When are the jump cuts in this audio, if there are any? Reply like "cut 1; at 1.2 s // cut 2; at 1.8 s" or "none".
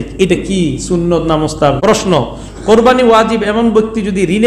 cut 1; at 1.8 s

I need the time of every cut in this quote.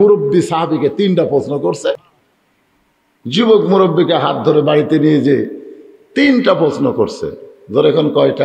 cut 1; at 2.1 s

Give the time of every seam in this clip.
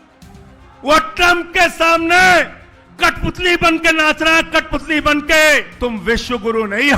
cut 1; at 6.0 s

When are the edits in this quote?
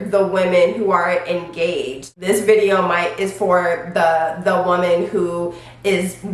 cut 1; at 2.1 s

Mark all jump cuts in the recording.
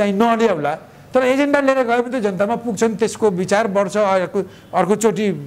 none

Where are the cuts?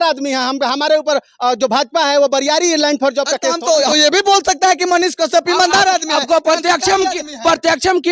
cut 1; at 3.9 s

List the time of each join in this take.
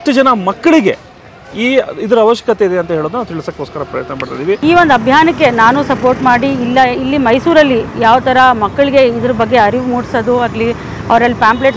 cut 1; at 4.6 s

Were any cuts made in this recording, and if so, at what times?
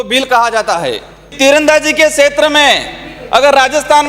cut 1; at 1.3 s

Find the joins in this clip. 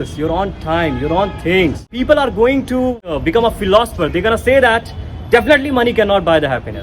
cut 1; at 1.9 s // cut 2; at 3.1 s

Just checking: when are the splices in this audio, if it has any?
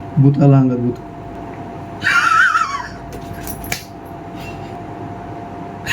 cut 1; at 1.3 s // cut 2; at 4.7 s

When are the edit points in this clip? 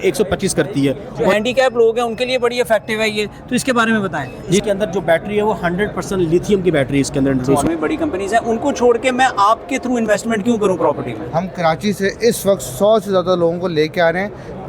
cut 1; at 1.3 s // cut 2; at 4.6 s // cut 3; at 7.6 s // cut 4; at 11.2 s

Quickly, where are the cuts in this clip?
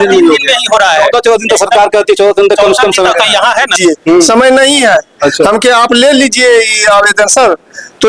cut 1; at 3.7 s

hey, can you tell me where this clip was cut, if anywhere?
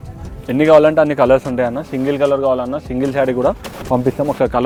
none

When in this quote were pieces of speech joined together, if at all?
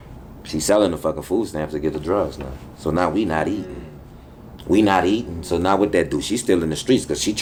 none

